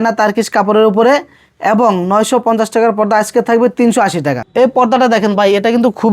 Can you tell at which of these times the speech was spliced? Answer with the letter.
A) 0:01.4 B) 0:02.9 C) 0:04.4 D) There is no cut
C